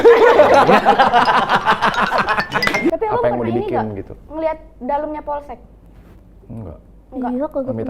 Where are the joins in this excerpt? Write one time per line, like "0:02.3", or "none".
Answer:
0:02.9